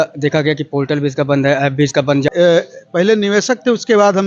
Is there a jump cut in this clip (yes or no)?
yes